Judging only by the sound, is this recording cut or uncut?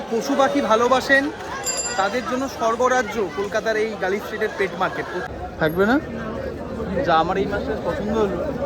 cut